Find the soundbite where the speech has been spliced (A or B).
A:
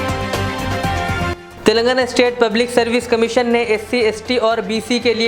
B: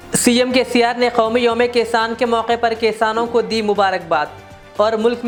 A